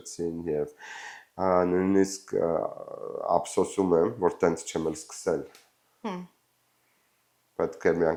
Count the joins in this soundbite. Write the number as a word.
zero